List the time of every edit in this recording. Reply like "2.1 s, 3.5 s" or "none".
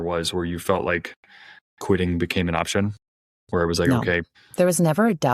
4.4 s